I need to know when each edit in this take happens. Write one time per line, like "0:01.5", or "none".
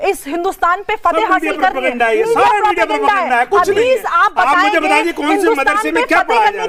none